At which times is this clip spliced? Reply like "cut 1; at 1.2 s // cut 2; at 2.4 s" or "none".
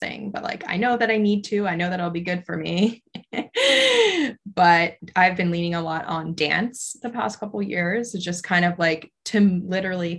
cut 1; at 5.0 s